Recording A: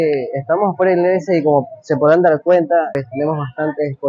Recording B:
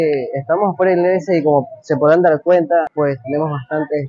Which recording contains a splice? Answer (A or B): A